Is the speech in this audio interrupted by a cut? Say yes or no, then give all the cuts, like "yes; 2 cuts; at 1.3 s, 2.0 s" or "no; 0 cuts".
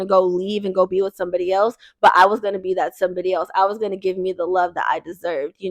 no; 0 cuts